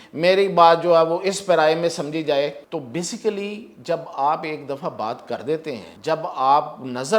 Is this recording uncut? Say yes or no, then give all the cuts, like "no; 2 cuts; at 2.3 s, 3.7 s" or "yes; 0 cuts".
no; 2 cuts; at 2.6 s, 5.9 s